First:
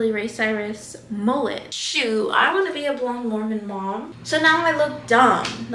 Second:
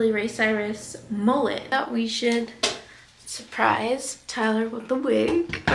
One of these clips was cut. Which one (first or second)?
first